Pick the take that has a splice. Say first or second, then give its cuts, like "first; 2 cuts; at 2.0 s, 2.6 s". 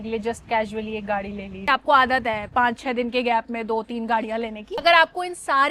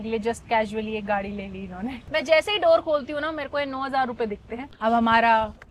first; 2 cuts; at 1.6 s, 4.7 s